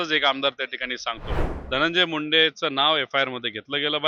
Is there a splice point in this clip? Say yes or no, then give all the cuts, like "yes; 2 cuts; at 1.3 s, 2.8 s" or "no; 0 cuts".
yes; 1 cut; at 1.5 s